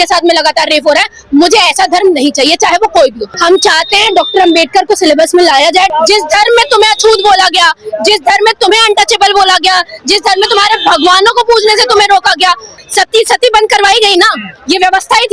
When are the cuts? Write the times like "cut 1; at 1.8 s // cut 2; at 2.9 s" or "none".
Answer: cut 1; at 3.3 s // cut 2; at 5.9 s // cut 3; at 12.8 s